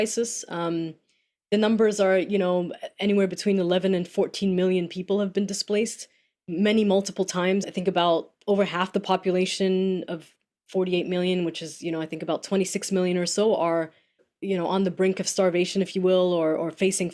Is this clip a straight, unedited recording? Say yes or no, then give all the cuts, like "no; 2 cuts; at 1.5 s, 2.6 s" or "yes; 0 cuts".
no; 2 cuts; at 7.7 s, 14.3 s